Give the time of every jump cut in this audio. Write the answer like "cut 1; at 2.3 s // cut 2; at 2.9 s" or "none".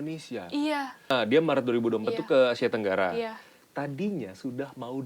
cut 1; at 1.1 s